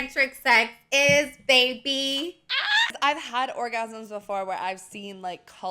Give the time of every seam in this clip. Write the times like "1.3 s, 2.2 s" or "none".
2.9 s